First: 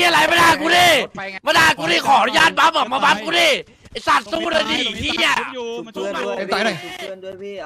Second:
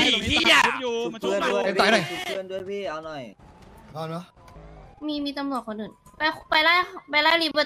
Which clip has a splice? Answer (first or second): second